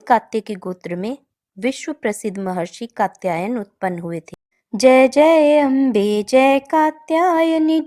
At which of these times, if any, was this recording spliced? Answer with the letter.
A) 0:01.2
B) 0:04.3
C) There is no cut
B